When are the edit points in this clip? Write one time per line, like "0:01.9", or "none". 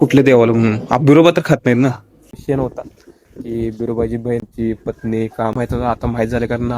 0:02.4
0:04.4
0:05.6